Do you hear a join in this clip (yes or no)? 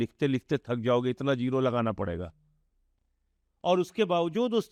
no